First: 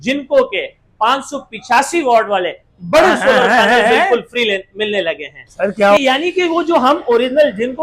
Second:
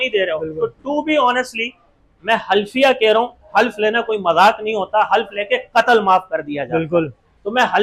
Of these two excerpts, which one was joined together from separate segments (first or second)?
first